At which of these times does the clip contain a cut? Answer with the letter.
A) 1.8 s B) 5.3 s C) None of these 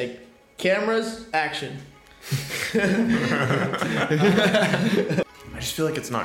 B